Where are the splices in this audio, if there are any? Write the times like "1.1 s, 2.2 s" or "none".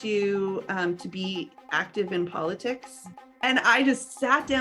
3.3 s